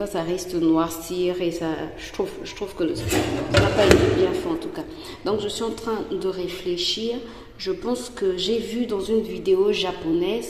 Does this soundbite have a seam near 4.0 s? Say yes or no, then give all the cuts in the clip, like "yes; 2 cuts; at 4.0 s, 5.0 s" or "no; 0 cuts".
no; 0 cuts